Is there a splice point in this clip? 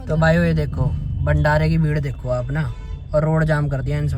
no; 0 cuts

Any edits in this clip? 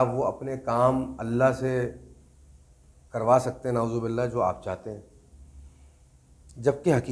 no; 0 cuts

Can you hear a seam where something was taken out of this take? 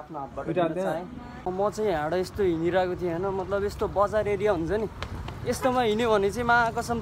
yes; 1 cut; at 1.2 s

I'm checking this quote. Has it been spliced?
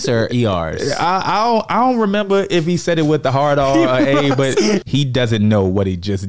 yes; 1 cut; at 4.8 s

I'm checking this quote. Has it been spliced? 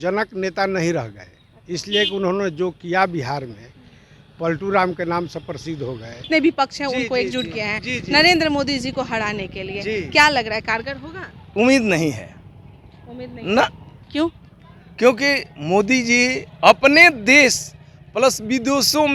yes; 1 cut; at 6.3 s

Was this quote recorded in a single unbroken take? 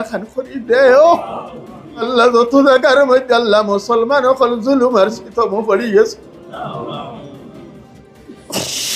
no; 1 cut; at 2.1 s

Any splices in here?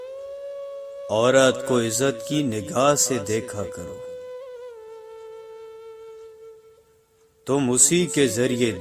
yes; 1 cut; at 1.1 s

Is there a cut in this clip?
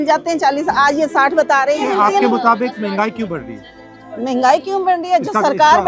no; 0 cuts

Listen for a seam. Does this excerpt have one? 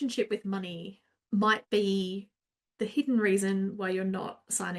no; 0 cuts

